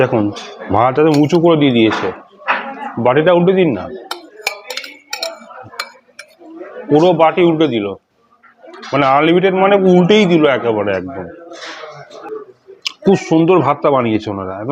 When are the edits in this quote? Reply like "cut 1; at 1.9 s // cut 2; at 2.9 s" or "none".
cut 1; at 12.2 s